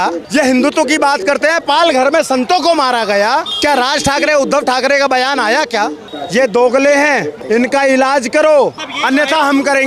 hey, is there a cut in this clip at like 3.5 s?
yes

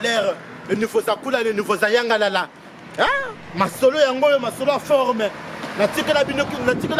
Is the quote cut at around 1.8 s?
no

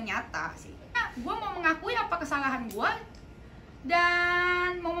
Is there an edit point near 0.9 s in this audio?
yes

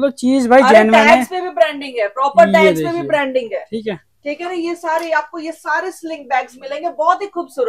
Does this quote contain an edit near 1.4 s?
no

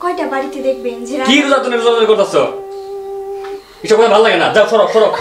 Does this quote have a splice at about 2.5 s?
yes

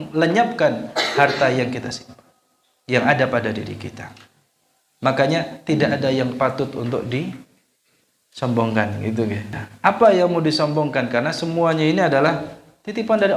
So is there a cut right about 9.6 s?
yes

